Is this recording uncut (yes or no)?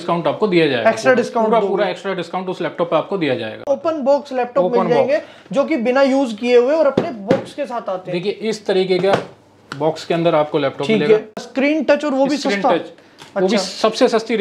no